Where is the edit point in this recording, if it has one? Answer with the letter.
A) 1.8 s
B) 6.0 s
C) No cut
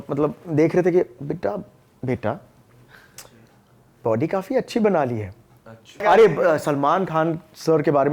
B